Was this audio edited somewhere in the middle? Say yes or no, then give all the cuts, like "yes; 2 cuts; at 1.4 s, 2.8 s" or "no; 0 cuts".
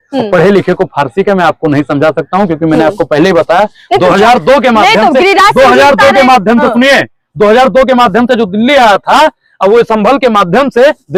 no; 0 cuts